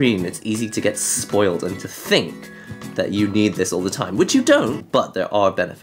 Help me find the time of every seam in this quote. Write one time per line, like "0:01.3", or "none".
0:04.8

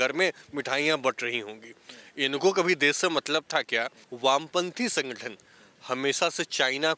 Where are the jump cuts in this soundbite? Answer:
0:04.0

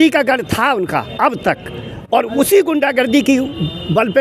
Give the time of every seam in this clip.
none

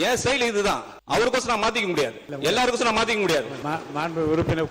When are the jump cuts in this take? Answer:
0:00.9
0:02.2
0:03.5

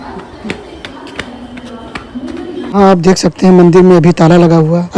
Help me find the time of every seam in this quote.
0:02.8

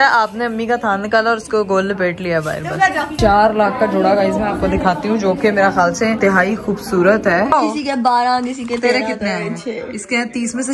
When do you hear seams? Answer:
0:03.1
0:06.2
0:07.5

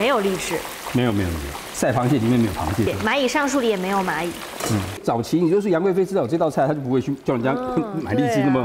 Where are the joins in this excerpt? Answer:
0:01.6
0:02.9
0:05.0

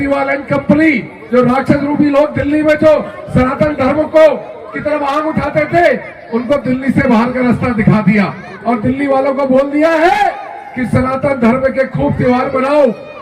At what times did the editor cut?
0:01.1

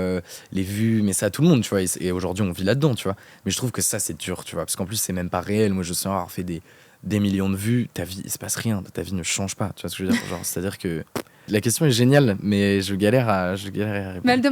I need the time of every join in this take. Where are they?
0:11.5

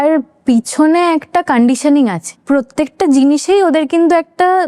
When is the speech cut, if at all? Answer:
0:02.3

